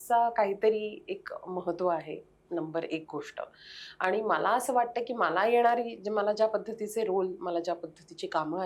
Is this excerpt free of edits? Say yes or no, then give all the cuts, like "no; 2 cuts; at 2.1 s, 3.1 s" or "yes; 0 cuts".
yes; 0 cuts